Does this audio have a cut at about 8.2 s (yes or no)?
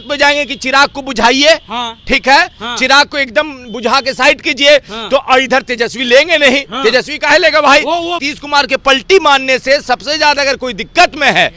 yes